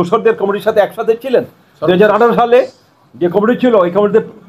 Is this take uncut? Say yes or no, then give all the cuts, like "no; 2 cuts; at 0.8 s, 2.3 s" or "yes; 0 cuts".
yes; 0 cuts